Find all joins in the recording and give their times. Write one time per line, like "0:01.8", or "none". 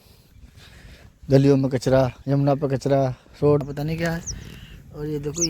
0:03.6